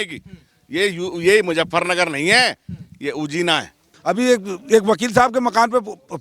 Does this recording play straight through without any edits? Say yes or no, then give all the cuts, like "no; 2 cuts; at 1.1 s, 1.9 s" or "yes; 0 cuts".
no; 1 cut; at 3.9 s